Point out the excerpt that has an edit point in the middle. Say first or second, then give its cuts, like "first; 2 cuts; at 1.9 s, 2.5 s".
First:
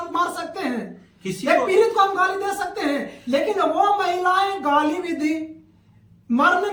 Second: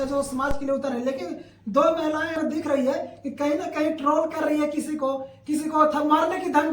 second; 1 cut; at 2.4 s